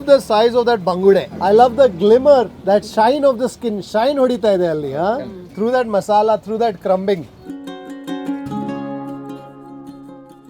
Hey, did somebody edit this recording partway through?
no; 0 cuts

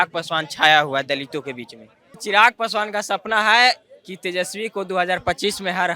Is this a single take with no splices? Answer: no; 1 cut; at 2.2 s

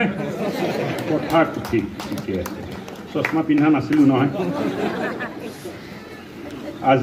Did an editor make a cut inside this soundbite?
no; 0 cuts

